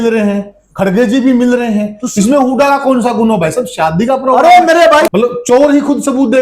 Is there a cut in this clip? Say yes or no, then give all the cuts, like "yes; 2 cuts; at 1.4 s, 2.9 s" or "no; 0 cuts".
yes; 1 cut; at 5.1 s